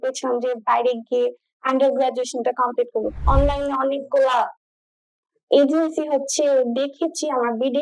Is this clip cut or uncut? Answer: cut